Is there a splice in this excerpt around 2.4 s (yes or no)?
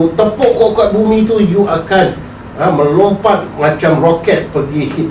no